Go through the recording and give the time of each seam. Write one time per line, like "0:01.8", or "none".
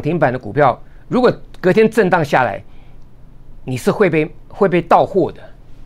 none

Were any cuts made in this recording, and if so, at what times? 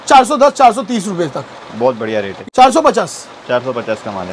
0:02.3

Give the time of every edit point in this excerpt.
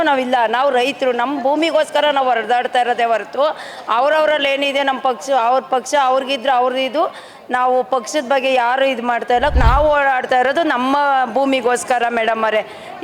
0:09.5

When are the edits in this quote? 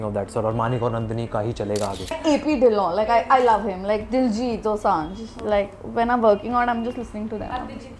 0:02.2

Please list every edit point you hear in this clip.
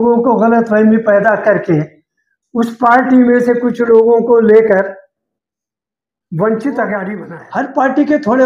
0:07.2

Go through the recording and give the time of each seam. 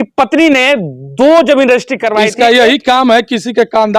0:02.3

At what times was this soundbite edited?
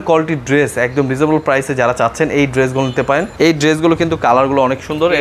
0:03.3

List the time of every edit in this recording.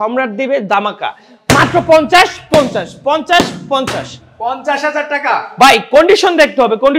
none

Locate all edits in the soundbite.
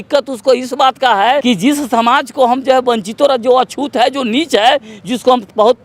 0:01.4

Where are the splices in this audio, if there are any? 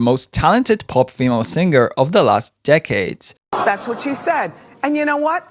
0:03.4

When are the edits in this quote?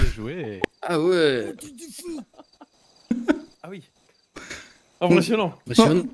none

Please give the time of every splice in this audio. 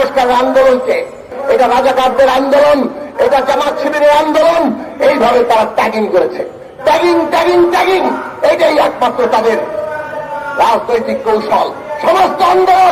0:01.3

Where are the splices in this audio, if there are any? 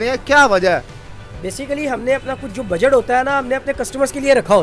none

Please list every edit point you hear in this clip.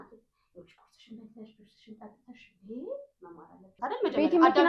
0:03.7

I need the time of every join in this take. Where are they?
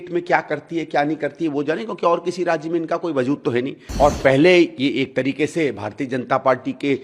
0:03.8

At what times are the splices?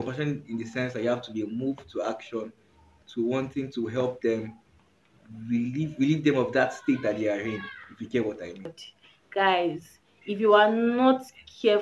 0:08.8

